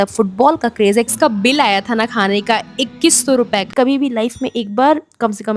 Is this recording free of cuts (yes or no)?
no